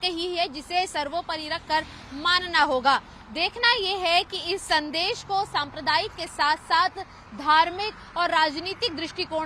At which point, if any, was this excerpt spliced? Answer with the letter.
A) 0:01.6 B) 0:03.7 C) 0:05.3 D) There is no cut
D